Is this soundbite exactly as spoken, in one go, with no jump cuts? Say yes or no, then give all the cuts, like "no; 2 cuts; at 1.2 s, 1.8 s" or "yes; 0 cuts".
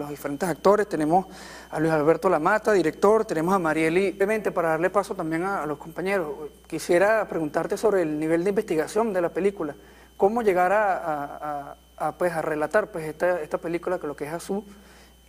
yes; 0 cuts